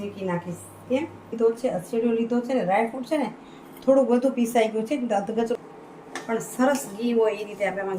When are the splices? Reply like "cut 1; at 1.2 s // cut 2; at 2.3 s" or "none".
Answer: cut 1; at 1.3 s // cut 2; at 5.5 s